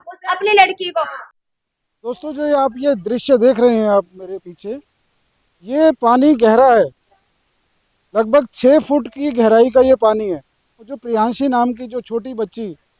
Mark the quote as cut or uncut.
cut